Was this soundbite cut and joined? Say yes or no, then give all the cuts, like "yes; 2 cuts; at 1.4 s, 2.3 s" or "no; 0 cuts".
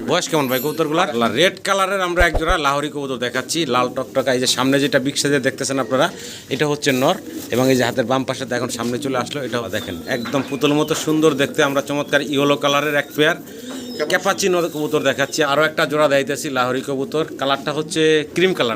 yes; 3 cuts; at 1.1 s, 9.6 s, 15.5 s